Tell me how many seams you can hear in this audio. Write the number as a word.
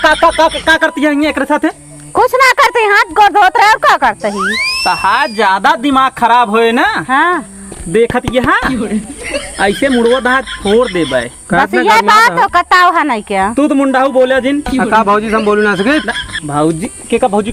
zero